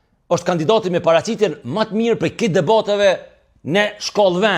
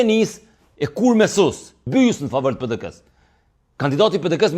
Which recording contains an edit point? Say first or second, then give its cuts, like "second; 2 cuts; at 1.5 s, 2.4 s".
second; 1 cut; at 1.8 s